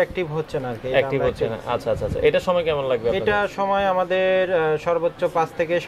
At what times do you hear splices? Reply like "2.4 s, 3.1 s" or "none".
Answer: none